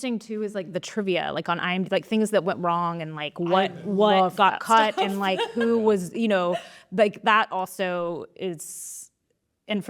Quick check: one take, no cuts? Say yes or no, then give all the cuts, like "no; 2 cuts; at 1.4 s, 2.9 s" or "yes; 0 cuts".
yes; 0 cuts